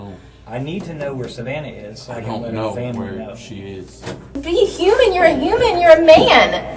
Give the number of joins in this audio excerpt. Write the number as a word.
one